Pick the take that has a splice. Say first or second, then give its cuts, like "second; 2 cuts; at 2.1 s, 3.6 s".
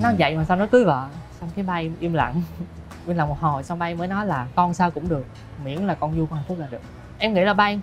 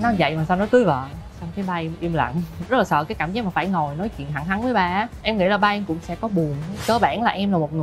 second; 3 cuts; at 2.7 s, 5.2 s, 6.7 s